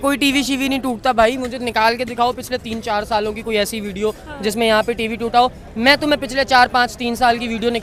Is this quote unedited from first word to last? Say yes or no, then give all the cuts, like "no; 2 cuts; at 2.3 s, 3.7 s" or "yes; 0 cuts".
yes; 0 cuts